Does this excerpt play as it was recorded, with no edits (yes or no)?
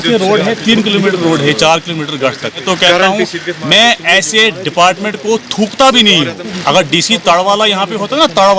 no